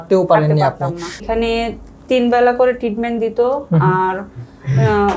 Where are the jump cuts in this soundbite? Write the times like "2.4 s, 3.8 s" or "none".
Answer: 1.2 s